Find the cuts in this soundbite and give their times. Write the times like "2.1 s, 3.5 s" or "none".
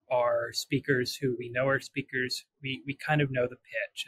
none